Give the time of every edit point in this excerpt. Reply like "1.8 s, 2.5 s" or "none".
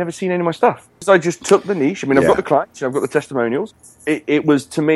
0.9 s, 3.7 s